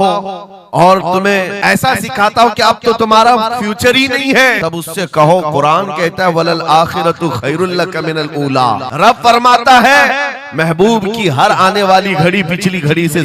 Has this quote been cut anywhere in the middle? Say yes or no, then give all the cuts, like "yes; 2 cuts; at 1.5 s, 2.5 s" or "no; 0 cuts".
yes; 3 cuts; at 1.5 s, 4.6 s, 8.9 s